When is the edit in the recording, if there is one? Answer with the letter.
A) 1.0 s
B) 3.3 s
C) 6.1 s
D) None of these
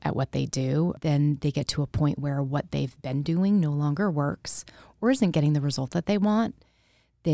A